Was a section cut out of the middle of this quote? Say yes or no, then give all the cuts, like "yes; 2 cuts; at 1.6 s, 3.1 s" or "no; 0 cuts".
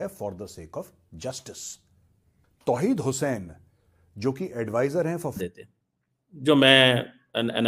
yes; 1 cut; at 5.4 s